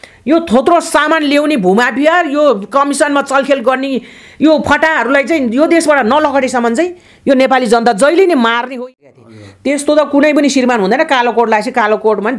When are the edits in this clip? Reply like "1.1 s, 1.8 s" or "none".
8.9 s